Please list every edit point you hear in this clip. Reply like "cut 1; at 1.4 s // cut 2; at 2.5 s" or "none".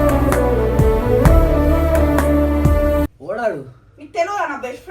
cut 1; at 3.2 s